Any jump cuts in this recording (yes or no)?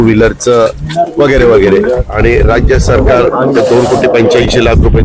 yes